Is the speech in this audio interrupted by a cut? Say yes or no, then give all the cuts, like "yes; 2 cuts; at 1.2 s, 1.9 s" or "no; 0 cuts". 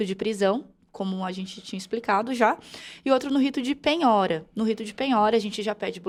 no; 0 cuts